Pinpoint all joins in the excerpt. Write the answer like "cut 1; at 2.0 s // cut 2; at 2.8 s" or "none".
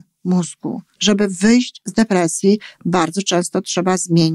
cut 1; at 1.0 s